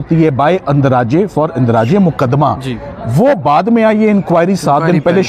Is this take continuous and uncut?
yes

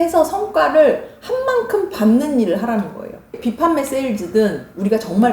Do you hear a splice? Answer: yes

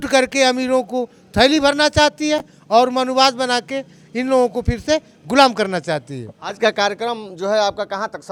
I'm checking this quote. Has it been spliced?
no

